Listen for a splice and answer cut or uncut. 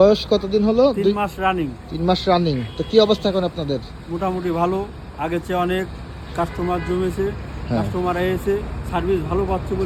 uncut